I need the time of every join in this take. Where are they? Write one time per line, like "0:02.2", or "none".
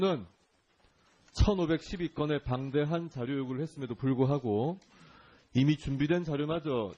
0:04.8